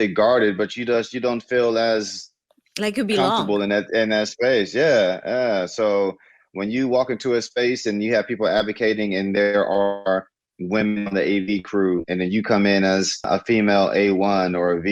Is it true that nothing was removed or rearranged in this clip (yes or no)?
no